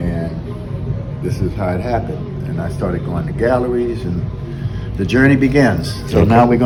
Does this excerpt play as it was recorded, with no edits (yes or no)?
yes